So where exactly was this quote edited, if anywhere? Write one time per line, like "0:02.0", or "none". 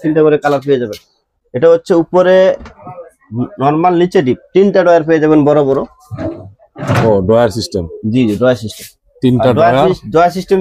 0:01.2